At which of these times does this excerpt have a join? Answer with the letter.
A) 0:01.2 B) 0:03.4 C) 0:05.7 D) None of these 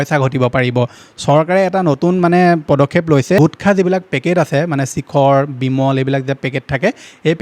B